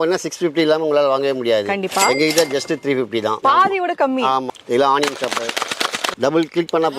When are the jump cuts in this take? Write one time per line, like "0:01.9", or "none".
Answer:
0:04.5
0:06.1